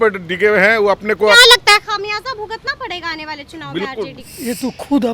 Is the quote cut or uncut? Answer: cut